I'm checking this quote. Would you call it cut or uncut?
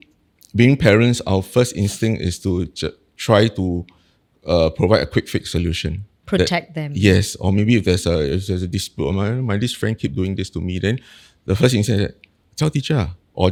uncut